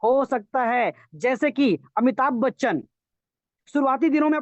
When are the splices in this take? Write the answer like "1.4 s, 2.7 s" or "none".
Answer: none